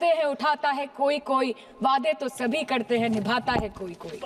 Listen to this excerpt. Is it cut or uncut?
uncut